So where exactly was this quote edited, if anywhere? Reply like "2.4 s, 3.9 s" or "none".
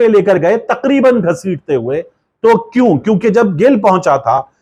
none